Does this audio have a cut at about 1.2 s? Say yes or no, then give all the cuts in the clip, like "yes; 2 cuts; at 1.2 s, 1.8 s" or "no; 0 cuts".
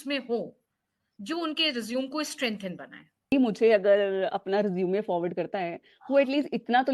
no; 1 cut; at 3.3 s